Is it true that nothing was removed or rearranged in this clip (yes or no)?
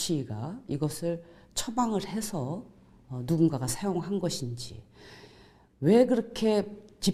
yes